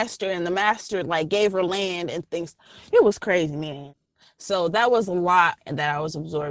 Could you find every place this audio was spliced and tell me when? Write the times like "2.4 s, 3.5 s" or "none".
3.9 s, 5.6 s